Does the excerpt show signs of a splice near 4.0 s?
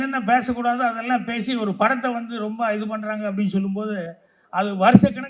no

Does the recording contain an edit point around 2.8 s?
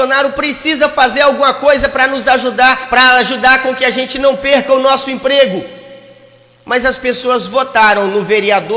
yes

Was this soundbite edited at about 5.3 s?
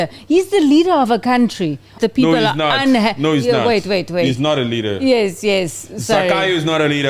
no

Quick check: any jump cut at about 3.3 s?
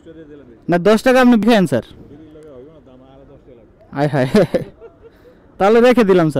no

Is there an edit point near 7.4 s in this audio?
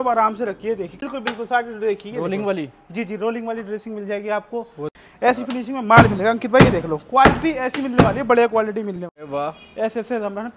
no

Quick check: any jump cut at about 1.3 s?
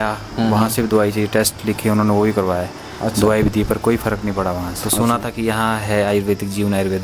no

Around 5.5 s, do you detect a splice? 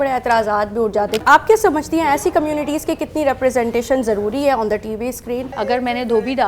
yes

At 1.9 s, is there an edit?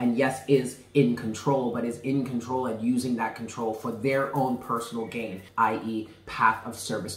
no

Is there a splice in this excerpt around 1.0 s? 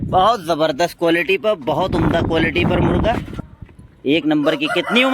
no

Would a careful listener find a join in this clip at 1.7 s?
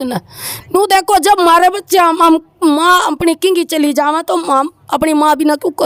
no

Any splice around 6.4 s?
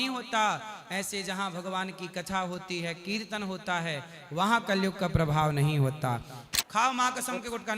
yes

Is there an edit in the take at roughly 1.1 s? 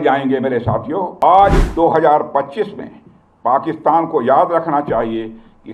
yes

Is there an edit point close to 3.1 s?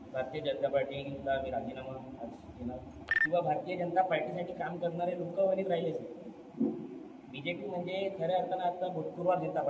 yes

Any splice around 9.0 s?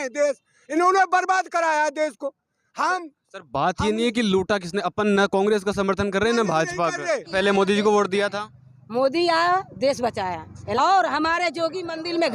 no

